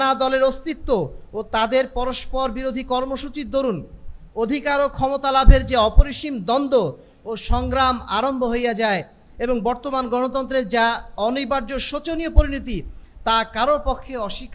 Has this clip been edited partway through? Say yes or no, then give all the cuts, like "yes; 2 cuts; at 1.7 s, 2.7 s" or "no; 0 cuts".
no; 0 cuts